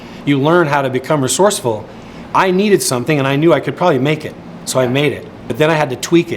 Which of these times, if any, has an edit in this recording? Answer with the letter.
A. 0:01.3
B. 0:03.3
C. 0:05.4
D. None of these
C